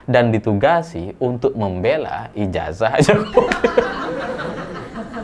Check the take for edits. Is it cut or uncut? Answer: cut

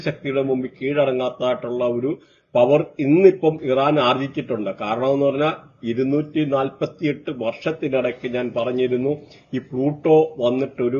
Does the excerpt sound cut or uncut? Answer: uncut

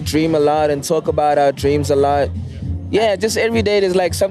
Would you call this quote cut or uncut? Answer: cut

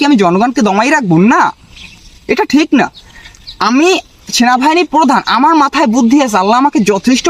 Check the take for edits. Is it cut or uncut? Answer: uncut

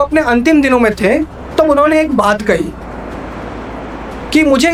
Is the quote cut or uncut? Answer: uncut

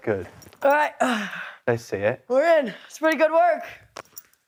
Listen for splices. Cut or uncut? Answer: uncut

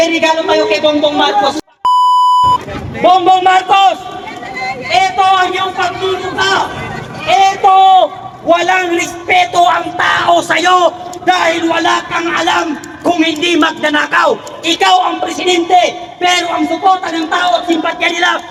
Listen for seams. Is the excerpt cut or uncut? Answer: uncut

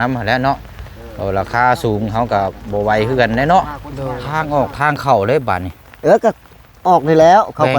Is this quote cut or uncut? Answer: cut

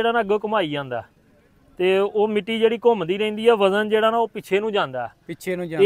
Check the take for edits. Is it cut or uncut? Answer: uncut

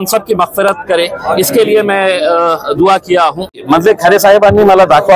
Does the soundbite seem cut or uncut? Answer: cut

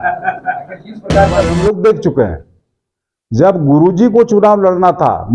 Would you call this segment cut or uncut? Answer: cut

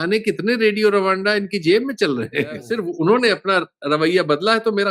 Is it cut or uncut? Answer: cut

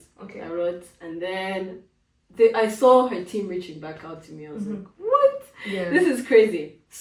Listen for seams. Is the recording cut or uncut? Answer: uncut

